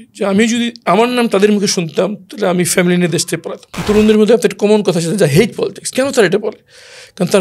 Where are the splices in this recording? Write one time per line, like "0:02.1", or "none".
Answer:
0:03.8

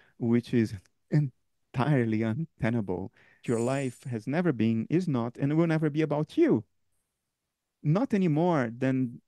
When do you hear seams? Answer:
0:03.4

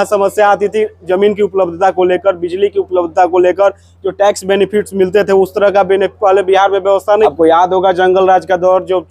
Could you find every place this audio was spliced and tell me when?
0:07.3

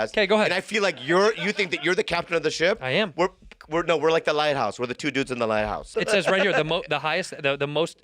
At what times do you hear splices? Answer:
0:05.8

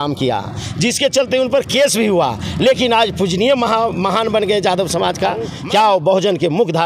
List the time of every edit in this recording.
0:05.6

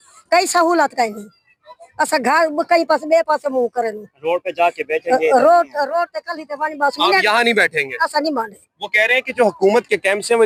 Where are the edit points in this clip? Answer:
none

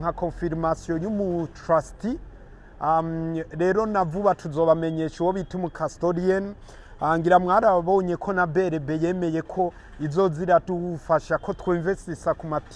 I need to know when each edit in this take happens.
none

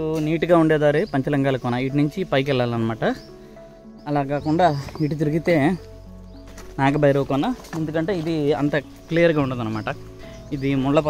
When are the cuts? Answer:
0:08.9

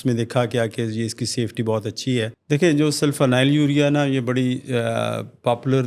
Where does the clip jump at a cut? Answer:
0:02.4

